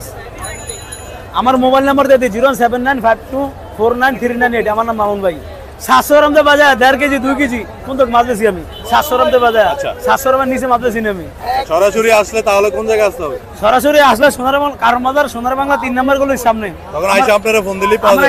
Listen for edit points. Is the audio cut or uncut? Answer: uncut